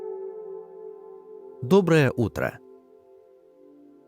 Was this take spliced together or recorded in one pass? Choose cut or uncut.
cut